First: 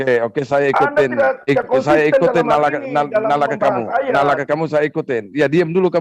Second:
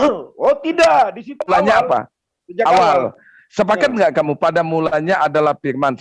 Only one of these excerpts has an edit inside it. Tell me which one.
second; 1 cut; at 1.5 s

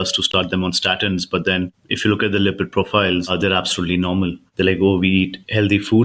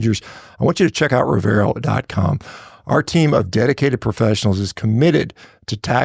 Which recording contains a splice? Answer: first; 3 cuts; at 1.8 s, 3.3 s, 4.4 s

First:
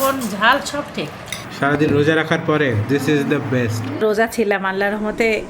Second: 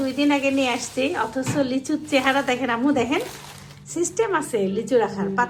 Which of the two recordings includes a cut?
first; 2 cuts; at 1.4 s, 3.9 s

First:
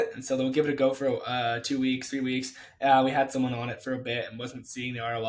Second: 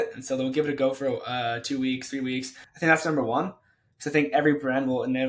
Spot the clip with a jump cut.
second; 1 cut; at 2.6 s

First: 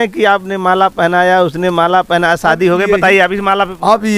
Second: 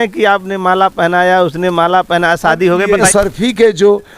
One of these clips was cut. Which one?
second; 1 cut; at 3.1 s

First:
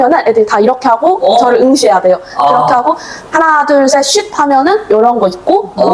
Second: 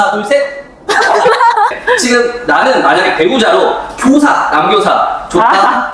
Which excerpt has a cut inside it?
second; 1 cut; at 1.8 s

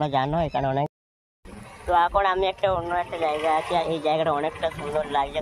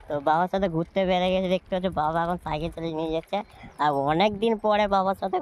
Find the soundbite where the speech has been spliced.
first; 1 cut; at 0.9 s

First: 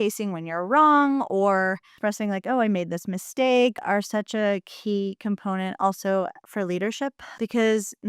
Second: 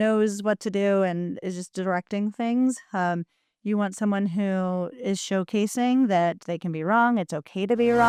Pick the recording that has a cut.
first; 3 cuts; at 1.9 s, 3.8 s, 7.2 s

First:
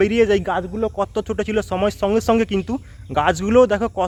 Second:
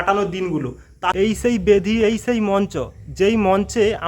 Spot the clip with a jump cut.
second; 1 cut; at 1.1 s

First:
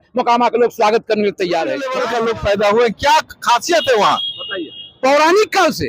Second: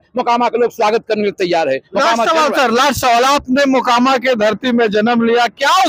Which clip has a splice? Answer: first; 1 cut; at 1.9 s

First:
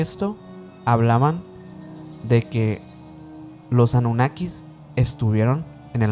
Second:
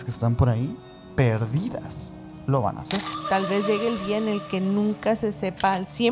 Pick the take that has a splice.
second; 1 cut; at 3.1 s

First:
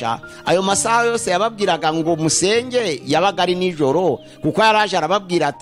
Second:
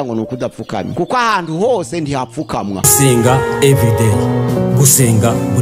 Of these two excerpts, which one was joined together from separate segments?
second; 2 cuts; at 0.9 s, 2.8 s

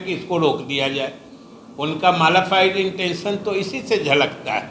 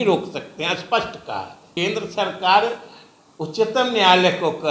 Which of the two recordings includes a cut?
second; 1 cut; at 1.6 s

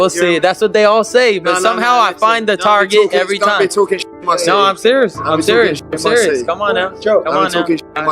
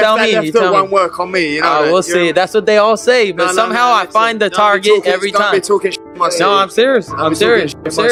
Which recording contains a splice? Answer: first; 1 cut; at 7.1 s

